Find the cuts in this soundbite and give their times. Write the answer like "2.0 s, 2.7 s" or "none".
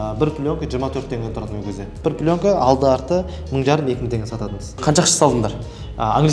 2.0 s, 4.7 s